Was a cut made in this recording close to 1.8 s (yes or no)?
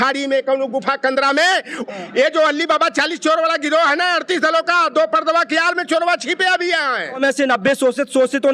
yes